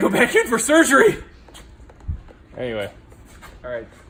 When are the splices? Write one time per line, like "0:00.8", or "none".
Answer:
none